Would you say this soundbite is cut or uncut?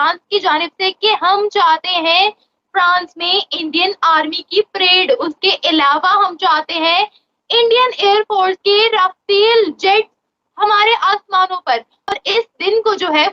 uncut